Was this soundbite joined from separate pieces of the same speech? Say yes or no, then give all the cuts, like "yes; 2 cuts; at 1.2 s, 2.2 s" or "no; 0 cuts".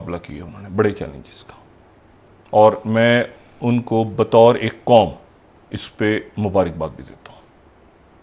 no; 0 cuts